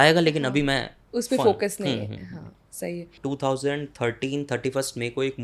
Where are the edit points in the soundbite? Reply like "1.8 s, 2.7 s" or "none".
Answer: 3.1 s

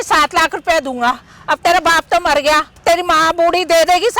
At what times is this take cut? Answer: 2.7 s

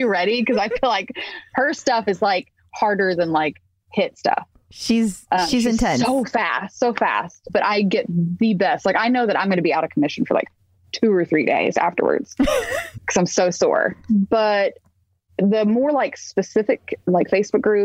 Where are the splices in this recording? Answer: 7.5 s

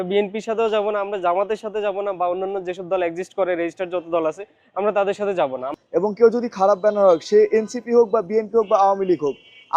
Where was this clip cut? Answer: 5.8 s

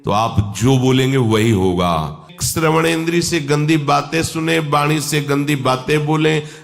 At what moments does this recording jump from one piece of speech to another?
2.3 s

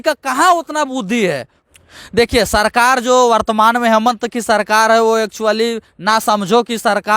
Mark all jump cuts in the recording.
1.6 s

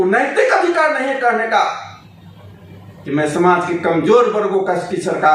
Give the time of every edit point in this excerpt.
none

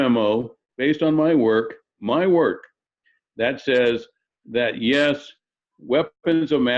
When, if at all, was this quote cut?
none

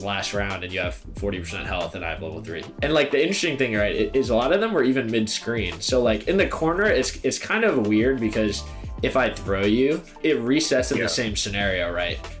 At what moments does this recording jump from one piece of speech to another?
2.7 s

